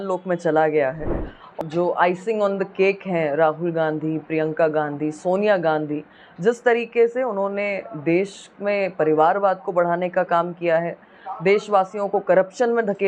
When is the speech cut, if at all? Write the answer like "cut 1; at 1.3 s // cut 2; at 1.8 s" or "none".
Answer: cut 1; at 1.6 s